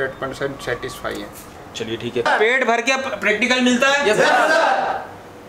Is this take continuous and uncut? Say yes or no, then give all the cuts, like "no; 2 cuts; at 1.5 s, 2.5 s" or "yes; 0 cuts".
no; 1 cut; at 2.3 s